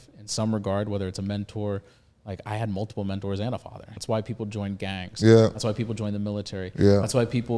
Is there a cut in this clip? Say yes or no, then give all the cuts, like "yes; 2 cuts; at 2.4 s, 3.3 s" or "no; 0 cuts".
yes; 1 cut; at 3.9 s